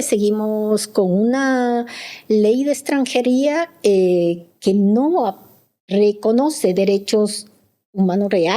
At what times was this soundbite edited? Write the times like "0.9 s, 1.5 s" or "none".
none